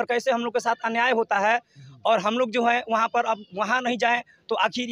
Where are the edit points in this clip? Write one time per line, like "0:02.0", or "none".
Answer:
none